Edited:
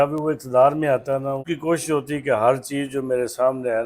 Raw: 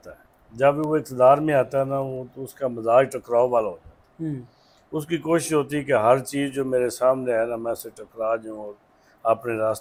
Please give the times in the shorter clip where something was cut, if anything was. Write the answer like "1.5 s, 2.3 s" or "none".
1.5 s